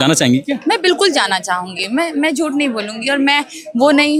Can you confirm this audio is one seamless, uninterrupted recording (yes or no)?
yes